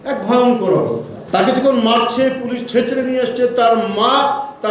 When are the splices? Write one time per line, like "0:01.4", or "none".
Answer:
0:01.1